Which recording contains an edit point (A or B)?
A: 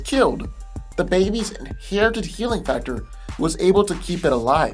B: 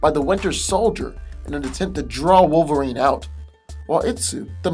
A